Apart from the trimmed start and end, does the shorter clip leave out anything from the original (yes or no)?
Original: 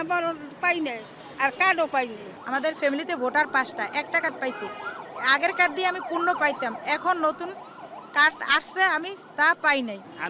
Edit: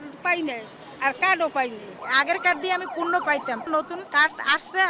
yes